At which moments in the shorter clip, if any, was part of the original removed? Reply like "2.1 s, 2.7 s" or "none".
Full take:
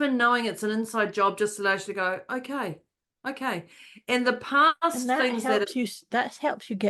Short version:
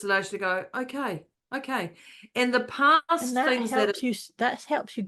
1.3 s